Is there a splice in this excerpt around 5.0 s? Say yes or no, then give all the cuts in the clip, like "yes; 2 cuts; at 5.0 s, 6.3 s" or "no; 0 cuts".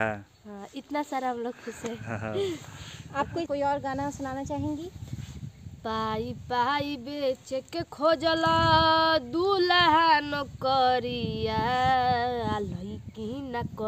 no; 1 cut; at 3.5 s